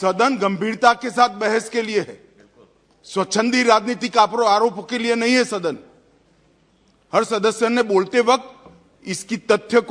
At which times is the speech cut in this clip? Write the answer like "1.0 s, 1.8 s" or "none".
none